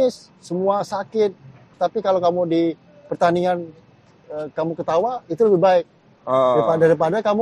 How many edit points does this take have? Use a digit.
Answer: 1